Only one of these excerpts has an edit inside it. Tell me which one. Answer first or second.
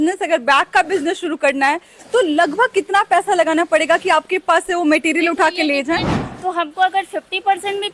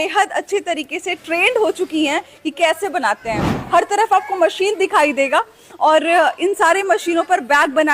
first